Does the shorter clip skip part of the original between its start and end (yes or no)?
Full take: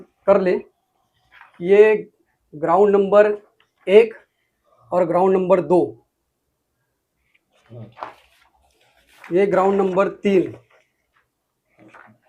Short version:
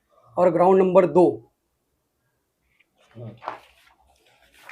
no